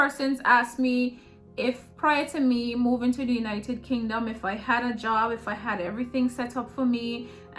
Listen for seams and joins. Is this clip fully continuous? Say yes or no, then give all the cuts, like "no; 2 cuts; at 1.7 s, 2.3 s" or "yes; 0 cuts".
yes; 0 cuts